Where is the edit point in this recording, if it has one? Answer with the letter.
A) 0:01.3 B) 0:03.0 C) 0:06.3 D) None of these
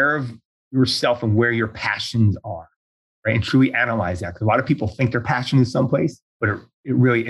C